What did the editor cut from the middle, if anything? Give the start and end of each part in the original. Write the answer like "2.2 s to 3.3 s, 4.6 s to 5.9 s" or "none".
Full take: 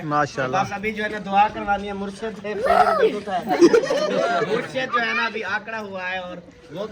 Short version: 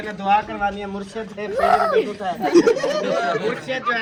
none